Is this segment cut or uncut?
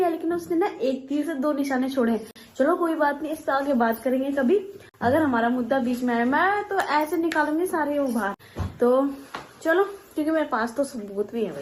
uncut